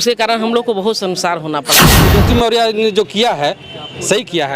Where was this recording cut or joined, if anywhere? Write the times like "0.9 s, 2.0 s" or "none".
2.1 s